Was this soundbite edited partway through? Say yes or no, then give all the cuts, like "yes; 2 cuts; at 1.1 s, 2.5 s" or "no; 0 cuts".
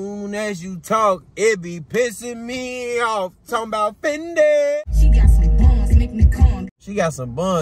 yes; 2 cuts; at 4.8 s, 6.8 s